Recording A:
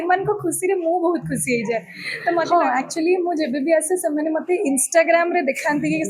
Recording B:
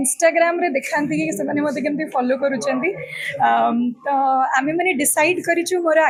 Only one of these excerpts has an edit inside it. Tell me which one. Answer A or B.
A